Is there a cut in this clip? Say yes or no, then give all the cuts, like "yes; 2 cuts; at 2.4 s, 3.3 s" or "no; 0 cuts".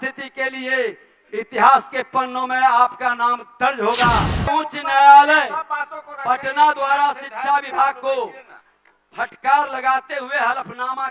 yes; 1 cut; at 4.5 s